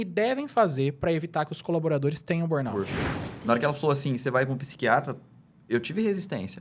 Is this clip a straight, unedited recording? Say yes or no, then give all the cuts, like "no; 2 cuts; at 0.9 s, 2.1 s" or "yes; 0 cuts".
no; 1 cut; at 2.7 s